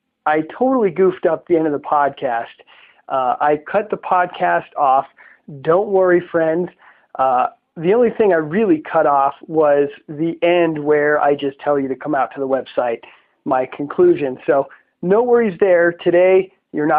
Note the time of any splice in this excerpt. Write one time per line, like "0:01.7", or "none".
none